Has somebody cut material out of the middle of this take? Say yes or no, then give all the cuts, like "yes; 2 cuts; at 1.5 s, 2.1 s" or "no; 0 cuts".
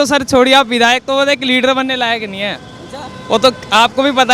no; 0 cuts